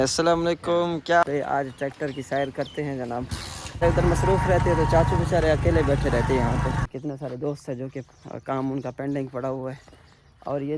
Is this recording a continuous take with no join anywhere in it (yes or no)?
no